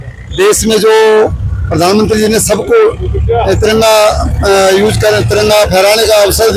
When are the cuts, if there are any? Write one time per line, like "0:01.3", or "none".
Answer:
none